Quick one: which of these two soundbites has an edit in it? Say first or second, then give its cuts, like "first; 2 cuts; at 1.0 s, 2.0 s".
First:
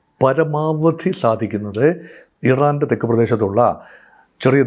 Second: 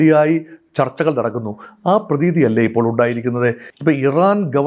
second; 1 cut; at 3.7 s